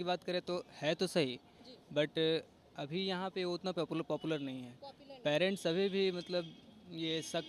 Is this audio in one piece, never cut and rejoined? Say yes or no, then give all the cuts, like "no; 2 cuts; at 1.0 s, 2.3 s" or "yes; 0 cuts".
yes; 0 cuts